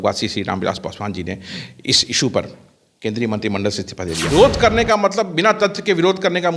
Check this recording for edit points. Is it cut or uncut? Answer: cut